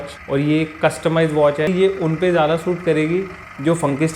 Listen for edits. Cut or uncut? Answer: cut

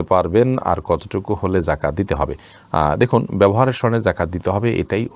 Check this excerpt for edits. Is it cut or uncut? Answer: uncut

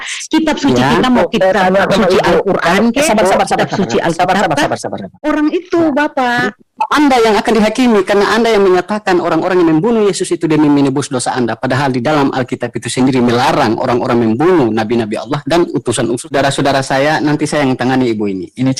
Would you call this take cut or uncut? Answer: cut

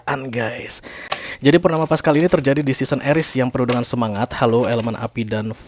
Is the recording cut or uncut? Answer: cut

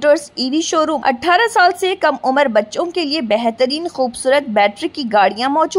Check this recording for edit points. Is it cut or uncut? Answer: cut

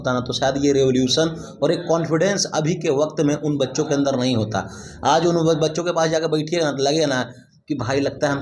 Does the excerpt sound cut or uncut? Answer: uncut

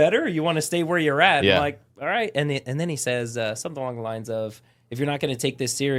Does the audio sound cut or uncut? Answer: uncut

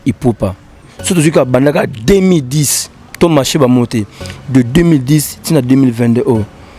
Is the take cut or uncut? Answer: cut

